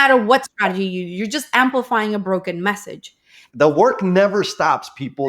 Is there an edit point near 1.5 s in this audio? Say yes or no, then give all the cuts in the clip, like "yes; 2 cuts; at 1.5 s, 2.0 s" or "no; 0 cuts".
no; 1 cut; at 3.4 s